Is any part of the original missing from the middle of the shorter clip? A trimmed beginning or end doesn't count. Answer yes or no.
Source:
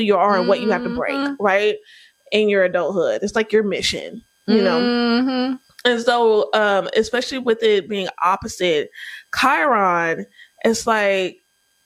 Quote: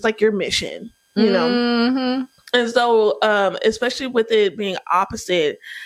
no